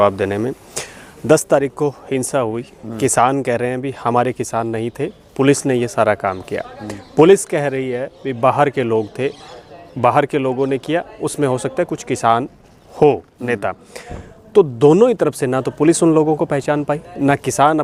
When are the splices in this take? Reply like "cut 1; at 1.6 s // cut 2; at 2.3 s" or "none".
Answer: none